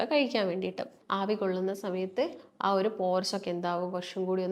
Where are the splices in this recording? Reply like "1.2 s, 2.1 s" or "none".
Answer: 0.9 s